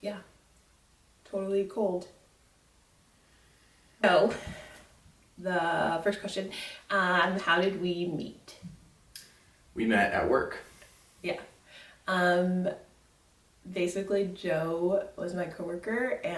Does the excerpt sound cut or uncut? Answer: cut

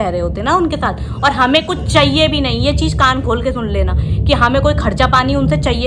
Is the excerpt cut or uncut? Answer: uncut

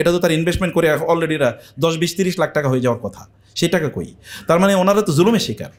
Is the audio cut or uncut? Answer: uncut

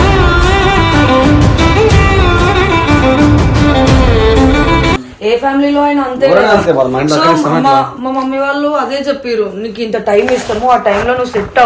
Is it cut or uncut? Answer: uncut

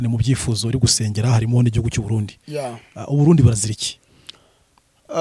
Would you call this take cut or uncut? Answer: uncut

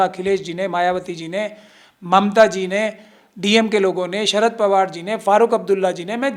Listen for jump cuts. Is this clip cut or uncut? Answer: uncut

